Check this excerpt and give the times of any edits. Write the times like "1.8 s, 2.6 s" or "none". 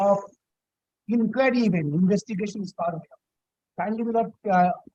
none